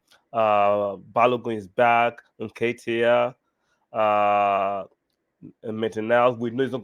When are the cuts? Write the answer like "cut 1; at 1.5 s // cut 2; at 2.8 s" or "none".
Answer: none